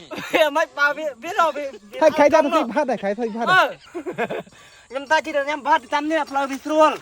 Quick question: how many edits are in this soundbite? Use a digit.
1